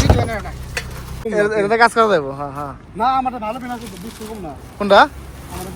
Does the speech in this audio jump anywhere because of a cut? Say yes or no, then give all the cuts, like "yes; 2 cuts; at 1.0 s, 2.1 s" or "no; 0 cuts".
yes; 1 cut; at 1.2 s